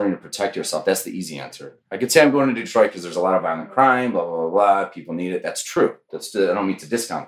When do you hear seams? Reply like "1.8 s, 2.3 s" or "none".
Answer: none